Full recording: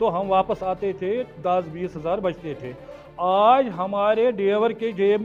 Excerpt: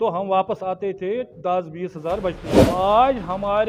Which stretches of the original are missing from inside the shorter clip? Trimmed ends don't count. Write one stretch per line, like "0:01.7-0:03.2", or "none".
0:02.5-0:03.0